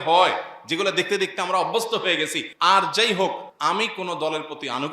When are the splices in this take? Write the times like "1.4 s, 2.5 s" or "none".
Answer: 2.4 s, 3.5 s